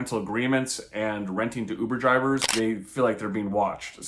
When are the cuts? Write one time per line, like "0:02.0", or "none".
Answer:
0:02.5